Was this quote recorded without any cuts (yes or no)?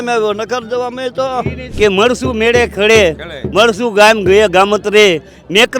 no